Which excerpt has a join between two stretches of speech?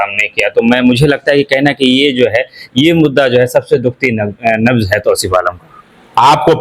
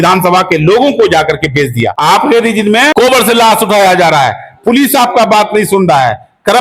second; 2 cuts; at 1.9 s, 2.9 s

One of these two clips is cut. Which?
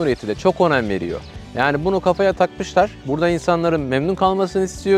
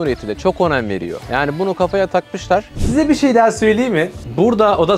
second; 2 cuts; at 1.2 s, 2.8 s

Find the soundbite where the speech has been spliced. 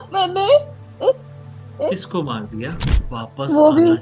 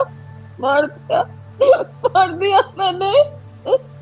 first; 1 cut; at 2.9 s

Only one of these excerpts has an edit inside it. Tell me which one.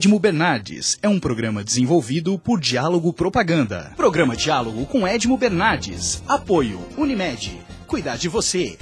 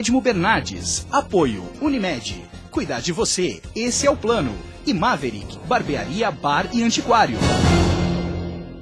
first; 1 cut; at 3.8 s

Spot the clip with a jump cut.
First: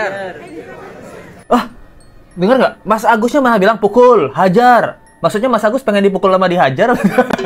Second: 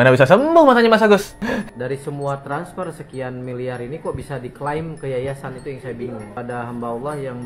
second; 2 cuts; at 1.3 s, 6.3 s

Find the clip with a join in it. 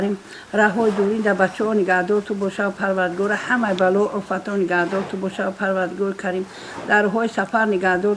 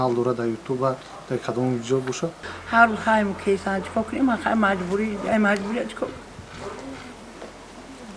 second; 1 cut; at 2.5 s

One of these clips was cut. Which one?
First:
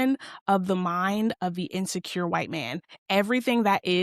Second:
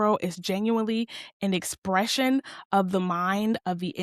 first; 1 cut; at 2.9 s

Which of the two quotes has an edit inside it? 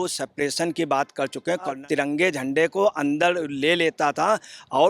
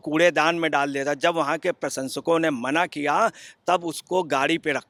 first; 1 cut; at 1.8 s

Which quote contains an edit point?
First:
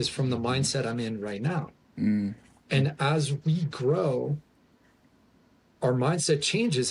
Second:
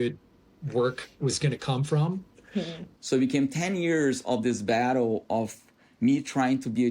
second; 1 cut; at 2.8 s

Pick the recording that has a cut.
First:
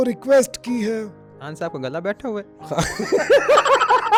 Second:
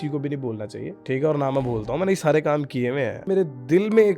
second; 2 cuts; at 1.0 s, 3.3 s

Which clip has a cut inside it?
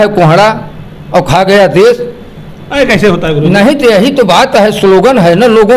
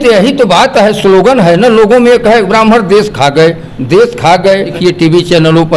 second; 1 cut; at 4.8 s

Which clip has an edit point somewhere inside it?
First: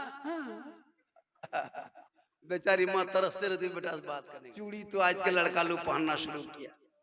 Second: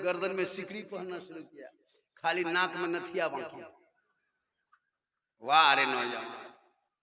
first; 1 cut; at 4.2 s

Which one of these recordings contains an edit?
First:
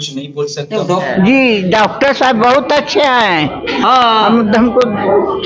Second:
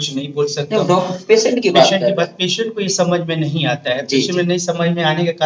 first; 1 cut; at 1.1 s

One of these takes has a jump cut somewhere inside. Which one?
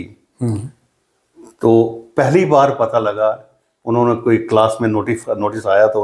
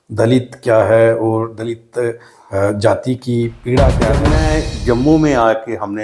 second; 1 cut; at 4.3 s

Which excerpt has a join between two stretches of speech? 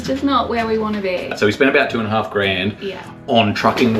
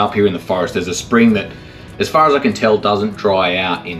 first; 1 cut; at 1.3 s

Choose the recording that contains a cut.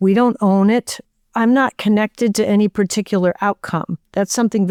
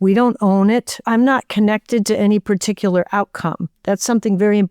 second; 1 cut; at 0.9 s

